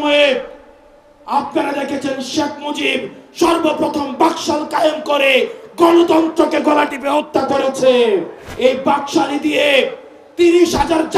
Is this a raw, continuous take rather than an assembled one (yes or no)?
no